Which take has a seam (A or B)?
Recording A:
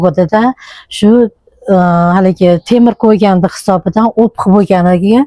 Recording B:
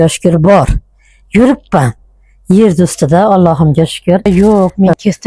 B